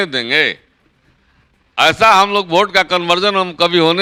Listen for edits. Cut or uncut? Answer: uncut